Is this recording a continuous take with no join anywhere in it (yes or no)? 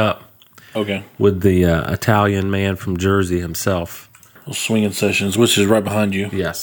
no